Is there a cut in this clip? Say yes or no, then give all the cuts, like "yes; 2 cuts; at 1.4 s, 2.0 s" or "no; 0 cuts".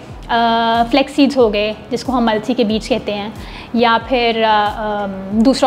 no; 0 cuts